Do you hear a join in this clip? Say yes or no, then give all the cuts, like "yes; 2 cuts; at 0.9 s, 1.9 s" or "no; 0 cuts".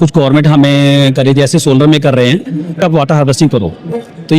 yes; 1 cut; at 2.8 s